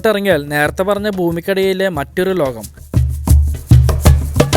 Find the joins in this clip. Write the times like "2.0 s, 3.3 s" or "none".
3.6 s